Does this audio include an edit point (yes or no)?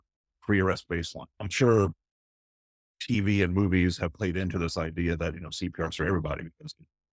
yes